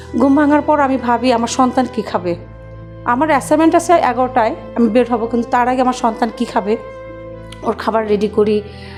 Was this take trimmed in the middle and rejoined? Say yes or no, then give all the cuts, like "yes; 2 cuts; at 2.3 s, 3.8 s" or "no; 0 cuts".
no; 0 cuts